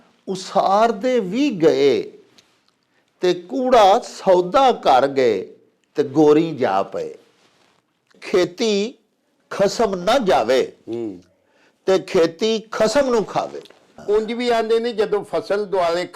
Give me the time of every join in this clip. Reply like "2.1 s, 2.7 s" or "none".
8.2 s, 13.9 s